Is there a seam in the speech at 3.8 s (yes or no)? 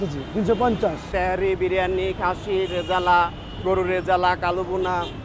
no